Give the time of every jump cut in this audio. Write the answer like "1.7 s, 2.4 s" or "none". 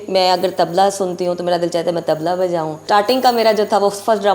2.8 s

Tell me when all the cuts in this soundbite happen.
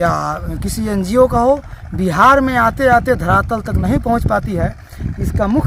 3.1 s

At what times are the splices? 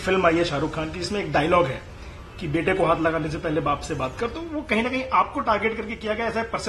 none

